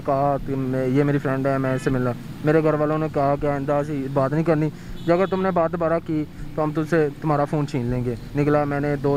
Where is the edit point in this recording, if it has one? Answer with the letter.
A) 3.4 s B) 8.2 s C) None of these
B